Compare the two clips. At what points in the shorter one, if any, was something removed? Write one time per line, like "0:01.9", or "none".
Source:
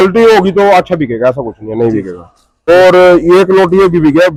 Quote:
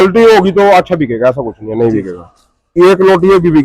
0:02.7